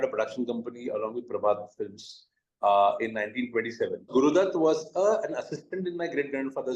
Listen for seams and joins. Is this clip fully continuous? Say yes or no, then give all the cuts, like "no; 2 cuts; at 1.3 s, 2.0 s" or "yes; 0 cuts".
no; 1 cut; at 4.1 s